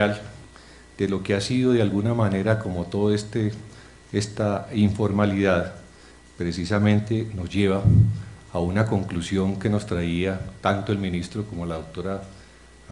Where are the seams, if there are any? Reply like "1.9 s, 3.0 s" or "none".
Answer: 3.5 s